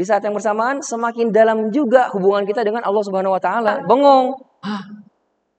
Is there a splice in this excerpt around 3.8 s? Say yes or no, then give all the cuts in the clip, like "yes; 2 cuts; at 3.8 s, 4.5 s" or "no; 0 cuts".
yes; 1 cut; at 3.8 s